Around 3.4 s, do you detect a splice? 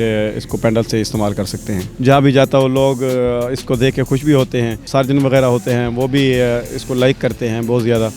no; 2 cuts; at 1.8 s, 4.8 s

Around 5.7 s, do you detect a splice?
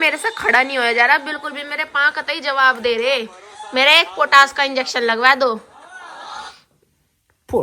no; 0 cuts

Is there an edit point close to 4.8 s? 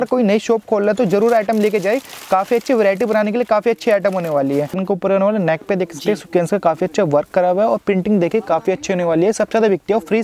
yes; 1 cut; at 4.8 s

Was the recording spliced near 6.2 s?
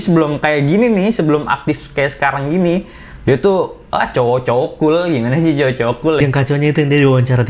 yes; 1 cut; at 6.2 s

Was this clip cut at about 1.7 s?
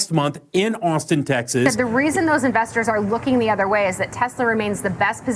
yes; 1 cut; at 1.7 s

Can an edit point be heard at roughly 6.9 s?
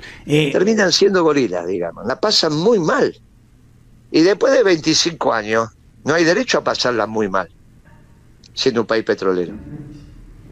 no; 1 cut; at 2.1 s

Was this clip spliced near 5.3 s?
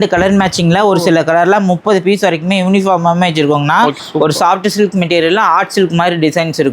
no; 1 cut; at 4.0 s

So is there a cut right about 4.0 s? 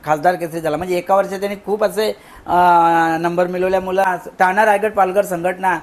yes; 1 cut; at 4.0 s

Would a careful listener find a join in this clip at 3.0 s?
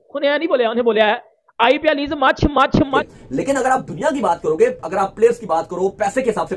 yes; 1 cut; at 3.0 s

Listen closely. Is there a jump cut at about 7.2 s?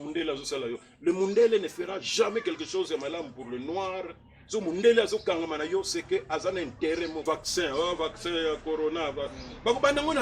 yes; 1 cut; at 7.2 s

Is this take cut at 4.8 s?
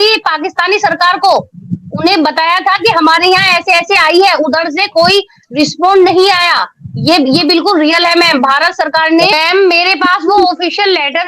no; 1 cut; at 9.3 s

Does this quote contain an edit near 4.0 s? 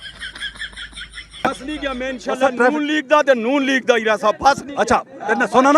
no; 1 cut; at 1.4 s

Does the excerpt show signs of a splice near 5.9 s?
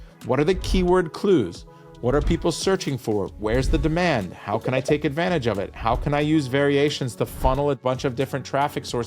no; 1 cut; at 7.8 s

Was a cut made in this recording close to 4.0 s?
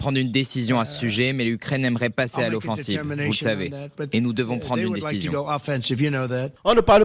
no; 0 cuts

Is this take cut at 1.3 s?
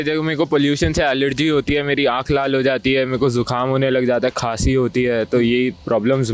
no; 0 cuts

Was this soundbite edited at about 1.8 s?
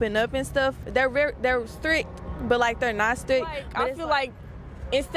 no; 1 cut; at 3.7 s

